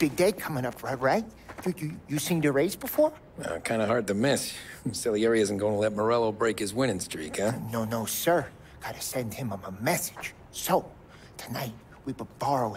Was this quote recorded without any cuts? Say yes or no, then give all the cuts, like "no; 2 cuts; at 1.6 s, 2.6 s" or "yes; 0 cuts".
yes; 0 cuts